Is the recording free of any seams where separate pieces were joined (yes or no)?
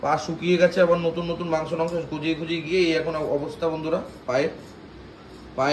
yes